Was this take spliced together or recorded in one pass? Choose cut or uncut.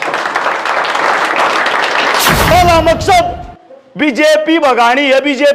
cut